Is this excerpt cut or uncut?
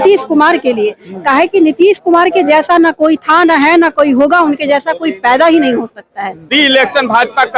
cut